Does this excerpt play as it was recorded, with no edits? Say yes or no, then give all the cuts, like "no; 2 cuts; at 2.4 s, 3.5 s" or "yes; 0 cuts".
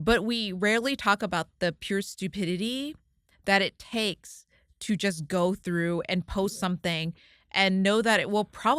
yes; 0 cuts